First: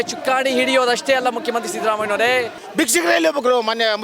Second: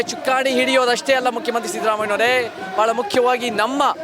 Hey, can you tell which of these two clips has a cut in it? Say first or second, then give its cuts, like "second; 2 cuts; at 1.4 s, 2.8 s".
first; 1 cut; at 2.6 s